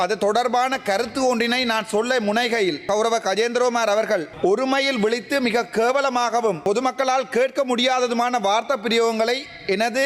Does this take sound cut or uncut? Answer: cut